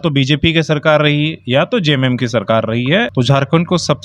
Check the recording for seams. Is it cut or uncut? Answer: cut